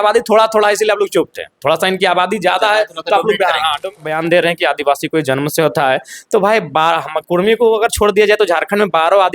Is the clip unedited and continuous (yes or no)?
no